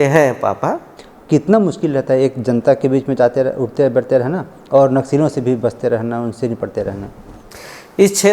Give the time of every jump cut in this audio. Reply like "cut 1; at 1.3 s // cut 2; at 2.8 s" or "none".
cut 1; at 0.9 s